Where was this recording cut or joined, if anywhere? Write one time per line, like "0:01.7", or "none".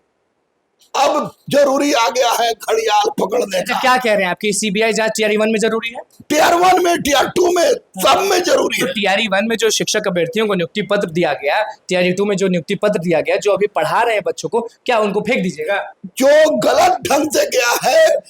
none